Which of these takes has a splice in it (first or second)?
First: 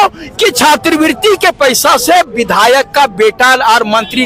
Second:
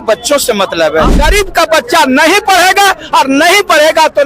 second